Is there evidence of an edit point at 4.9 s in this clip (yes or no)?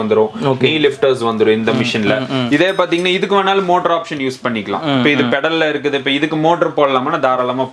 no